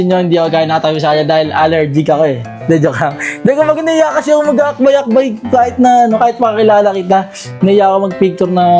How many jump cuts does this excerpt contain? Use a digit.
0